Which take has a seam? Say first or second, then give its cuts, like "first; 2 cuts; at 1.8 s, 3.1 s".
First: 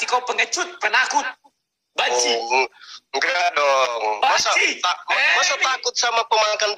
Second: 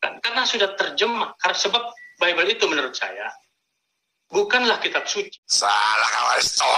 second; 1 cut; at 5.4 s